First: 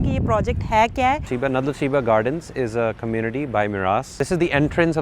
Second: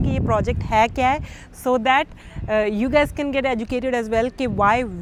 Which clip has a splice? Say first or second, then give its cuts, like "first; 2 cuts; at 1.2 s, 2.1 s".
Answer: first; 2 cuts; at 1.3 s, 4.1 s